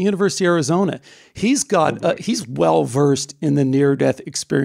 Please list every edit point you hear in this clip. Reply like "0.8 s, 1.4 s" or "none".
none